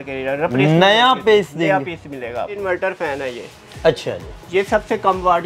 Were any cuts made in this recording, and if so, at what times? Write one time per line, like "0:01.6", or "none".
0:02.6